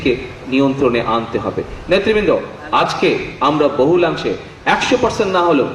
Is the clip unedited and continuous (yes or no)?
yes